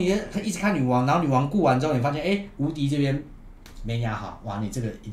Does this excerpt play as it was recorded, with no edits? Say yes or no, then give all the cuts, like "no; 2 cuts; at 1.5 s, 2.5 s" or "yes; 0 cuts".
yes; 0 cuts